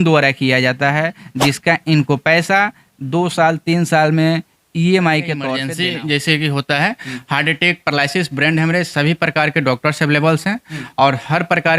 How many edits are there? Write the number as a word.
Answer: one